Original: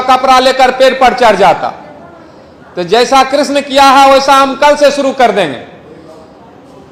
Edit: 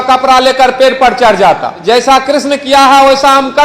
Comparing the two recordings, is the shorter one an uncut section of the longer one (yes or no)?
no